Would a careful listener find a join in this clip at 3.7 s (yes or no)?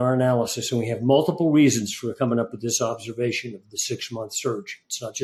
no